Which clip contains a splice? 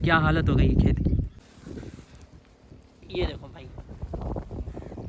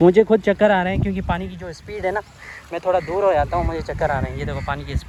first; 1 cut; at 1.4 s

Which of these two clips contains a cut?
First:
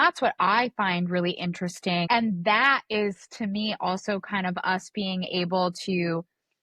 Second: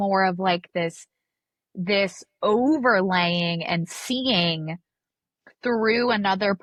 first; 1 cut; at 2.0 s

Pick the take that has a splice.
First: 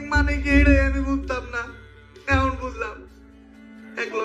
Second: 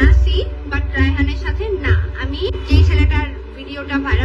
second; 1 cut; at 2.6 s

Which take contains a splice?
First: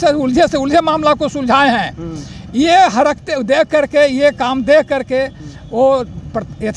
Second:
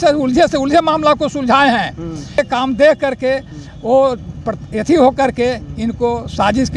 second; 1 cut; at 2.4 s

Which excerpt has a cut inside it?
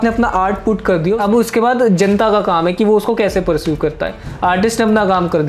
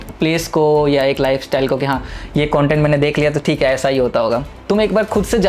first; 1 cut; at 1.2 s

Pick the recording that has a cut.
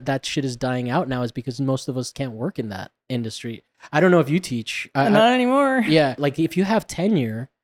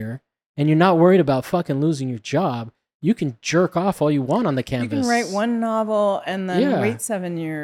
first; 2 cuts; at 3.7 s, 6.2 s

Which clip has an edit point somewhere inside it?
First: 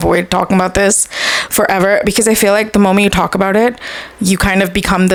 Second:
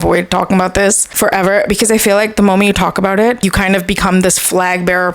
second; 2 cuts; at 1.1 s, 3.4 s

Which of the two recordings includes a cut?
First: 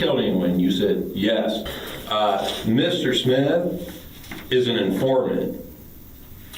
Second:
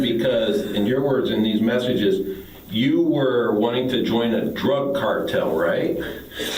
first; 1 cut; at 1.7 s

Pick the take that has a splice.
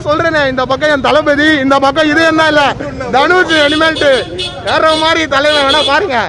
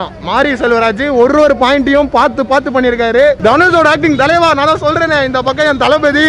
second; 1 cut; at 3.4 s

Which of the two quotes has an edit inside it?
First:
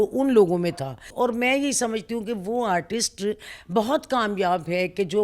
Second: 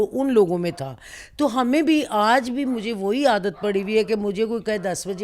first; 1 cut; at 1.1 s

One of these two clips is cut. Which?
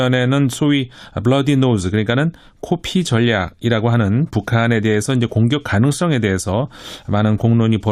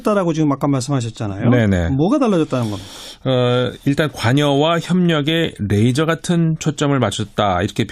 first; 1 cut; at 3.5 s

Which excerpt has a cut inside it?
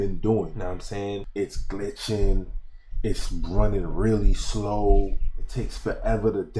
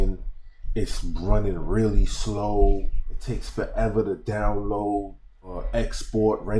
first; 1 cut; at 1.2 s

